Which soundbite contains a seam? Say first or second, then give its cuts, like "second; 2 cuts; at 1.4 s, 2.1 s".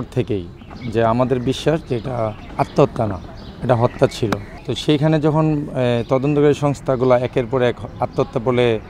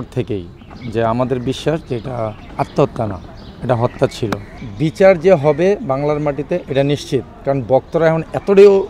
second; 1 cut; at 4.6 s